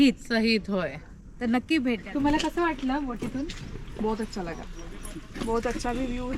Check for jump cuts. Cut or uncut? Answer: cut